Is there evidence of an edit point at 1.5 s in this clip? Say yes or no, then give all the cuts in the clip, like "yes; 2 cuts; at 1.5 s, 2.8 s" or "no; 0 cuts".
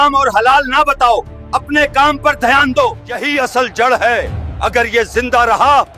no; 1 cut; at 3.1 s